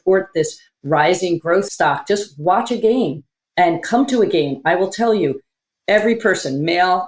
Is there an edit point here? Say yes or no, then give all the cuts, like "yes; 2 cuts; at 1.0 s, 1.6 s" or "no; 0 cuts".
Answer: yes; 1 cut; at 1.7 s